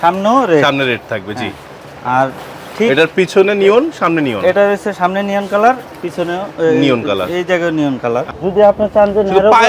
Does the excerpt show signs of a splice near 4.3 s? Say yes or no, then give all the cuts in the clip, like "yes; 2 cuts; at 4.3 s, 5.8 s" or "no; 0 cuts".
no; 1 cut; at 8.3 s